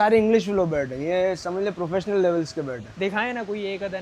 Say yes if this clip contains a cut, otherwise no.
no